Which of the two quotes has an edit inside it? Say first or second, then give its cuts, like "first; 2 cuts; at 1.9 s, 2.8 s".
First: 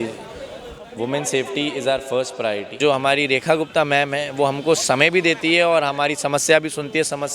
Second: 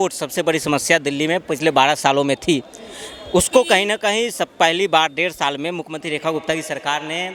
first; 1 cut; at 2.8 s